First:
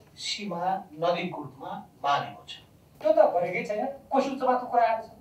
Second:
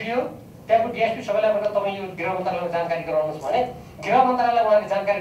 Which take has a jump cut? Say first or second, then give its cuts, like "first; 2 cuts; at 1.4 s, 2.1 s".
first; 1 cut; at 2.9 s